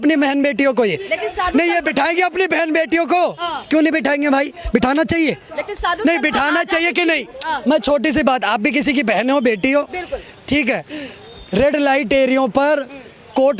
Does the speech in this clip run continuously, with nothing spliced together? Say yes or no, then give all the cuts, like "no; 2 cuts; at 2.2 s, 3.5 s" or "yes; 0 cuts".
yes; 0 cuts